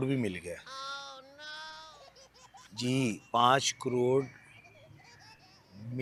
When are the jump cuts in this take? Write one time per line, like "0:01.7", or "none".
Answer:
none